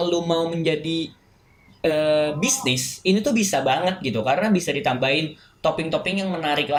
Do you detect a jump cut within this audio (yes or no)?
no